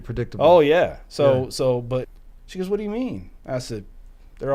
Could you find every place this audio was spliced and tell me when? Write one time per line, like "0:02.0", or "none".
0:02.1